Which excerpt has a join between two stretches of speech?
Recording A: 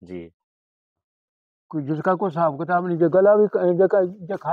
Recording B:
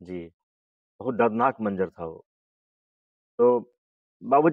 A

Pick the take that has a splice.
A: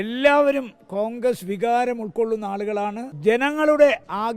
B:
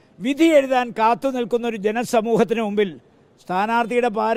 A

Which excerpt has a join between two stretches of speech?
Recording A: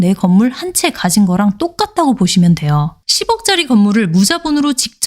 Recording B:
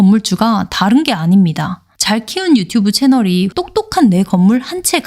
A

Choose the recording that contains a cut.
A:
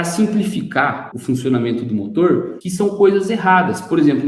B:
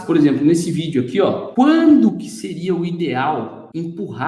B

